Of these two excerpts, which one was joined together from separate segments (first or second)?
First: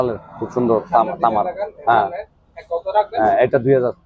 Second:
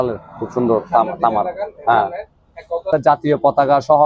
second